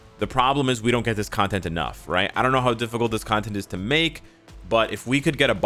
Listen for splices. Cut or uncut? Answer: uncut